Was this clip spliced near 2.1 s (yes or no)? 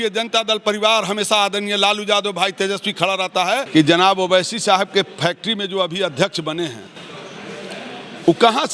no